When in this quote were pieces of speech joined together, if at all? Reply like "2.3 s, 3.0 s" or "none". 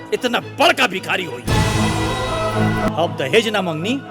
2.9 s